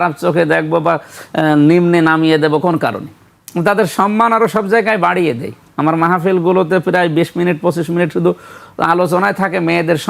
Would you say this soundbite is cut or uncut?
uncut